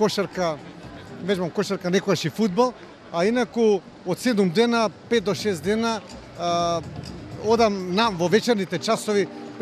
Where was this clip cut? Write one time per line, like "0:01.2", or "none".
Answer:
none